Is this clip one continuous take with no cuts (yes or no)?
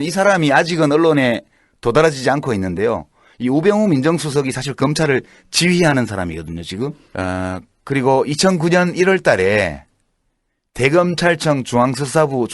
no